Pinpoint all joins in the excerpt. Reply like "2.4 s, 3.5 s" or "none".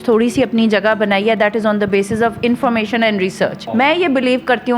none